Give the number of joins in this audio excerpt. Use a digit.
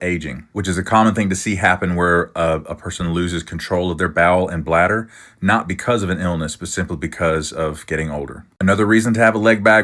1